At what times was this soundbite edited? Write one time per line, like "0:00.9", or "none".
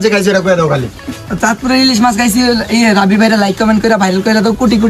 none